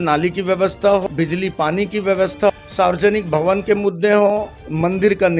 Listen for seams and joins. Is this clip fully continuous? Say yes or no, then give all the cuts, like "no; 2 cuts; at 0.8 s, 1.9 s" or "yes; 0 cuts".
no; 2 cuts; at 1.0 s, 2.5 s